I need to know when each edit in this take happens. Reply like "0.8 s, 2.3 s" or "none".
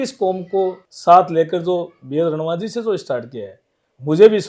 none